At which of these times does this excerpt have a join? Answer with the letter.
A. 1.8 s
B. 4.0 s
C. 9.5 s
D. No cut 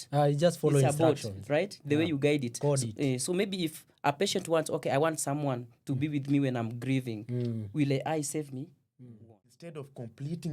C